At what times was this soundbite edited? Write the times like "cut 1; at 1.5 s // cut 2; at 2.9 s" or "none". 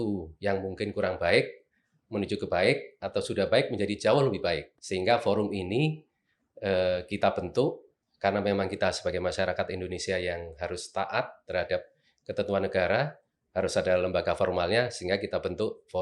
cut 1; at 4.8 s

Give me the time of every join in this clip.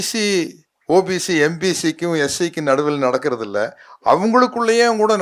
none

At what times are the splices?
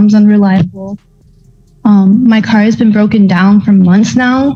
none

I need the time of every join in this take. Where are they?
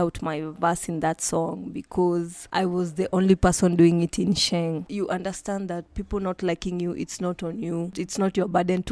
cut 1; at 2.4 s // cut 2; at 4.9 s

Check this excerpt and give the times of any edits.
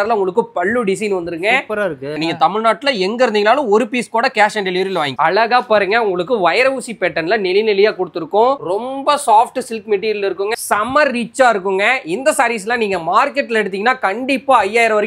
cut 1; at 2.2 s // cut 2; at 5.2 s // cut 3; at 10.6 s

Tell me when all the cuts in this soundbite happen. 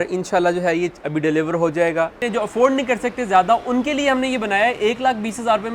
cut 1; at 2.2 s

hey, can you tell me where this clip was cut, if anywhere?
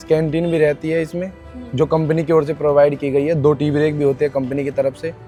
none

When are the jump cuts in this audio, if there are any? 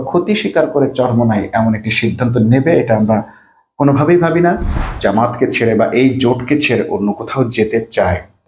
cut 1; at 4.9 s

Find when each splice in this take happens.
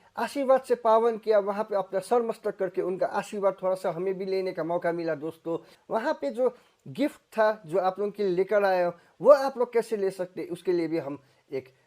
cut 1; at 5.8 s

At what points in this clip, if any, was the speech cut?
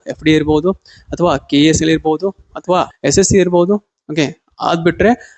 cut 1; at 2.9 s

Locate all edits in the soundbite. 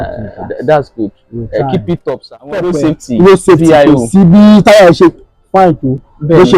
cut 1; at 2.7 s

